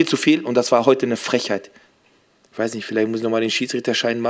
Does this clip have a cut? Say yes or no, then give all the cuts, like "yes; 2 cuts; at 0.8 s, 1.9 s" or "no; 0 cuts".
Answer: yes; 1 cut; at 1.8 s